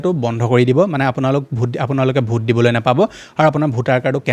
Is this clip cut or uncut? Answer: uncut